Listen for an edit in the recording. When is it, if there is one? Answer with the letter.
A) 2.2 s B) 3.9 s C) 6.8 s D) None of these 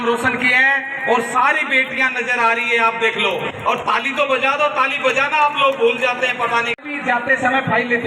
C